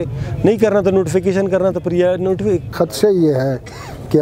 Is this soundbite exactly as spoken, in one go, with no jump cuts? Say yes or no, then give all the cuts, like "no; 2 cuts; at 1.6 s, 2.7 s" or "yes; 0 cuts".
no; 1 cut; at 2.8 s